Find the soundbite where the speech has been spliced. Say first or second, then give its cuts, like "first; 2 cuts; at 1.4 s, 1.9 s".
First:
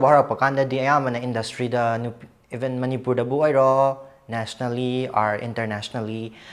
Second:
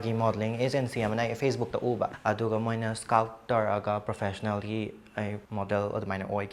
second; 2 cuts; at 2.2 s, 5.4 s